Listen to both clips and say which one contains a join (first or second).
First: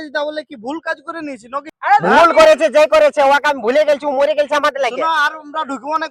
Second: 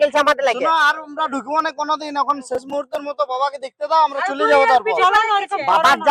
first